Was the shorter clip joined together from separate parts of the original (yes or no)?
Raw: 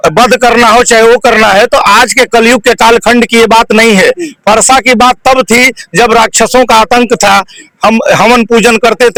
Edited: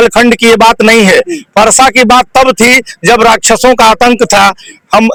no